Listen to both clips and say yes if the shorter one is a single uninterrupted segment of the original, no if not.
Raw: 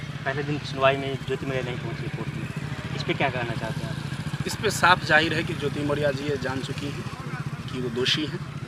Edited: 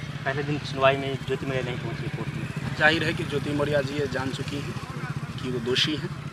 no